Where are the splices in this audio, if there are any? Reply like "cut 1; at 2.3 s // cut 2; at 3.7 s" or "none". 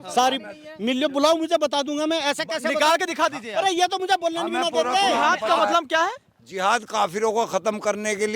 cut 1; at 5.2 s